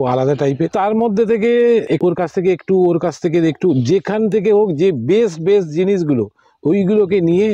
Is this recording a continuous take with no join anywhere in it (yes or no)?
no